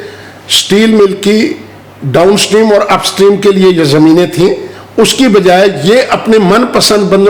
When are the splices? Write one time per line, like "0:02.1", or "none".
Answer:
none